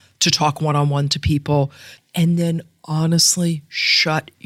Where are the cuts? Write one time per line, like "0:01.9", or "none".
0:01.9